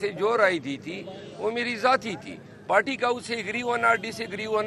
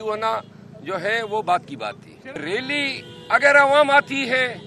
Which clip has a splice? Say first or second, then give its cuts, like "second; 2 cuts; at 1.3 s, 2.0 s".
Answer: second; 1 cut; at 2.4 s